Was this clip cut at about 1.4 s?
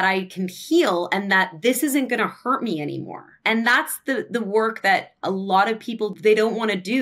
no; 2 cuts; at 3.3 s, 6.1 s

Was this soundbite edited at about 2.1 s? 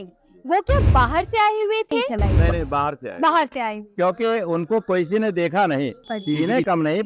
yes; 2 cuts; at 2.1 s, 6.1 s

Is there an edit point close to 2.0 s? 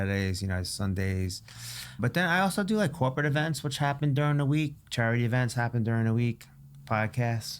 yes; 1 cut; at 2.0 s

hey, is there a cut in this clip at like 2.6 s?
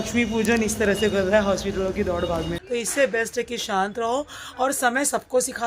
yes; 1 cut; at 2.6 s

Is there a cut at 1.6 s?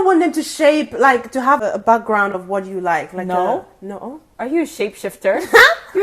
yes; 1 cut; at 1.6 s

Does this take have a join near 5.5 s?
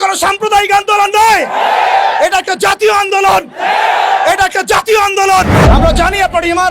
yes; 1 cut; at 5.5 s

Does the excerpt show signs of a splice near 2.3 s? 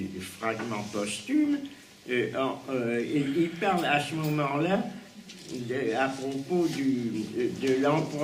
yes; 1 cut; at 2.3 s

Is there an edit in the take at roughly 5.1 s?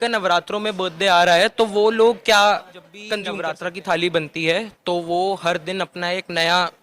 no; 1 cut; at 3.3 s

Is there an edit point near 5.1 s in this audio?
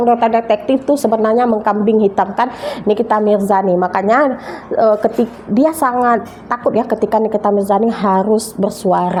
no; 0 cuts

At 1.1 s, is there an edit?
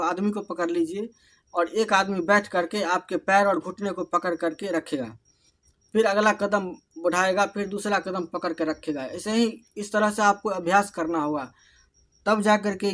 no; 0 cuts

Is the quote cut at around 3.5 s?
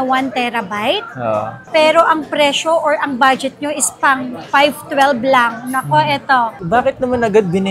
no; 1 cut; at 6.6 s

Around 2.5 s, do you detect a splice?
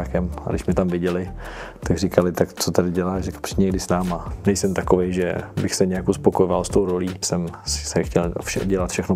no; 2 cuts; at 4.3 s, 7.3 s

